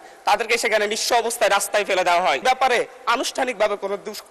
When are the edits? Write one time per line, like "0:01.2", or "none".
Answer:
0:02.4